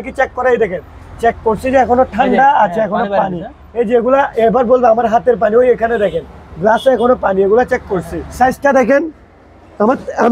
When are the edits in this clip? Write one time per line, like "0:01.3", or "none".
0:08.2